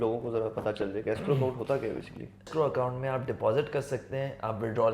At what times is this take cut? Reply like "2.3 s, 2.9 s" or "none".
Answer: 2.5 s